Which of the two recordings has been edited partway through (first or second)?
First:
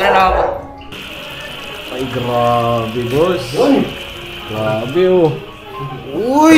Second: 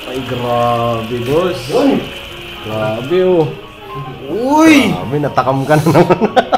first